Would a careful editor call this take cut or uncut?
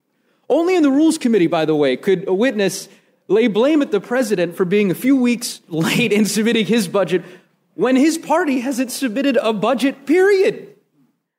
cut